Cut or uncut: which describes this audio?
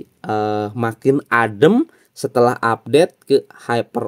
uncut